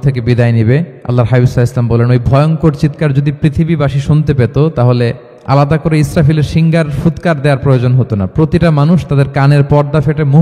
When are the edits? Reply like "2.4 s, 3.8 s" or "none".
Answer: 1.0 s, 5.3 s